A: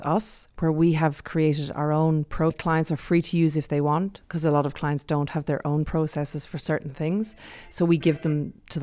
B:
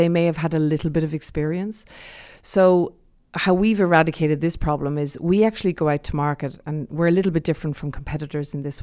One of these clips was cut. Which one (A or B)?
A